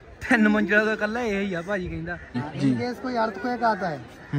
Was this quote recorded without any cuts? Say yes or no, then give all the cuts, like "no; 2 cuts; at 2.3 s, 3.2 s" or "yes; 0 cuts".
no; 1 cut; at 2.4 s